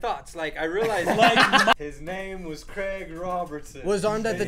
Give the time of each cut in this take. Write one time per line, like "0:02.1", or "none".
0:01.7